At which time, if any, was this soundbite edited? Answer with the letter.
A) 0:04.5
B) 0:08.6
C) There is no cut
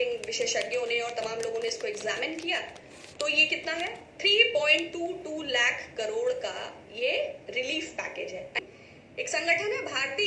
B